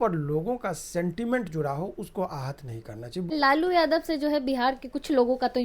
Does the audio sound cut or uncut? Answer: cut